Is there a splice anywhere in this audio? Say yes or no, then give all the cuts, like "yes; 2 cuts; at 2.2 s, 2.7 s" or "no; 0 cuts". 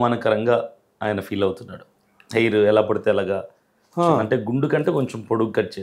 no; 0 cuts